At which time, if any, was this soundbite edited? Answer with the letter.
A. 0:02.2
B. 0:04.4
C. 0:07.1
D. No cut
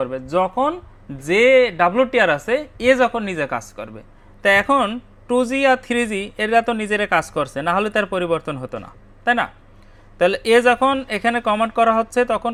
D